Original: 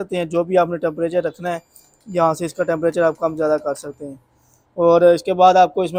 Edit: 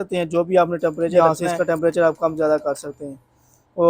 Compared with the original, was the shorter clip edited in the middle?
yes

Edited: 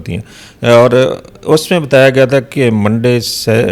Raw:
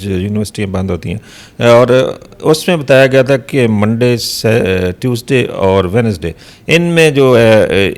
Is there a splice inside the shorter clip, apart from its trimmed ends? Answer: no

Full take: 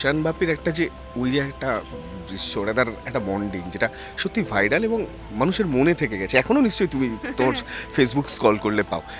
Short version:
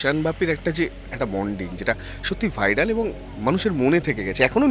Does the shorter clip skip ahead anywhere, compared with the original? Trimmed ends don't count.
yes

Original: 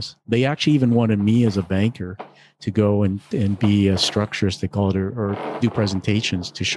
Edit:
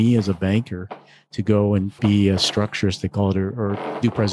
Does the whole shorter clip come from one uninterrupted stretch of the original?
no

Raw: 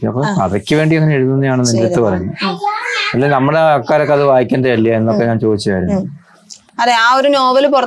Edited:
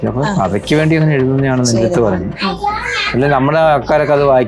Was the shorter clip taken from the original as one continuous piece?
yes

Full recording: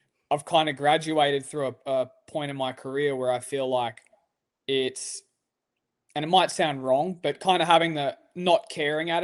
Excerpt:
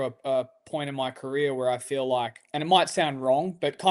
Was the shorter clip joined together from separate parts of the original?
yes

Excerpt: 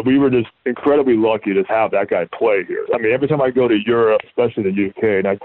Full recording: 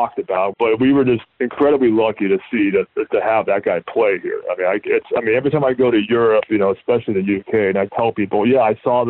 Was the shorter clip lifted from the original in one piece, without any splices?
no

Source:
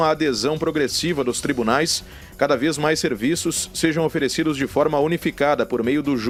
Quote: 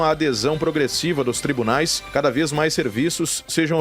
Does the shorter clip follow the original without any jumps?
no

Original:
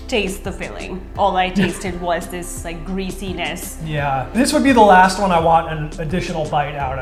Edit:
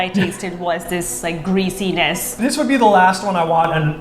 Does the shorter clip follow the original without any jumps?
no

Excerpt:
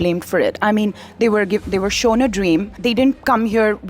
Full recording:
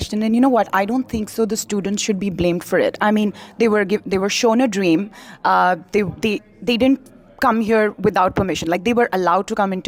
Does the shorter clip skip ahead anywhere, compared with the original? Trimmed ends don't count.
yes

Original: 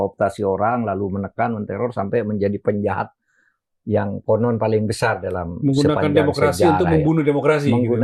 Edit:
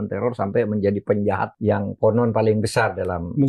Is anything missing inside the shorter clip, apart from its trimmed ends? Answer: yes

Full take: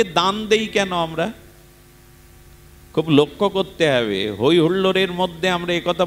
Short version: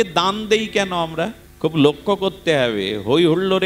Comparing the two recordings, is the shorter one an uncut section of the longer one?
no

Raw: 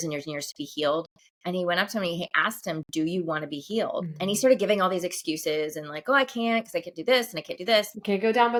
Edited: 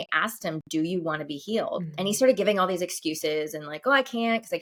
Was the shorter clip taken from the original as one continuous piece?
yes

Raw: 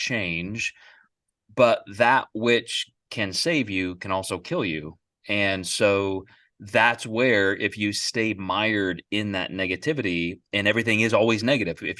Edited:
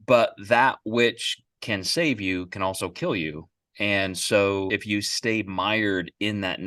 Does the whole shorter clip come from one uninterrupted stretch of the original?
no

